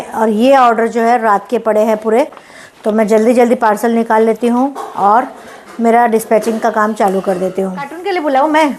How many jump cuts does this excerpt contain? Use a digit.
0